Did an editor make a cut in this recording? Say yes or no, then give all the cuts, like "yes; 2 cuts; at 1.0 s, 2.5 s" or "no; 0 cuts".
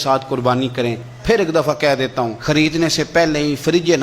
yes; 2 cuts; at 1.1 s, 2.4 s